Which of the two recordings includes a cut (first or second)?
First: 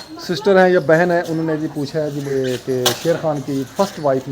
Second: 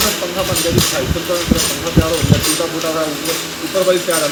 first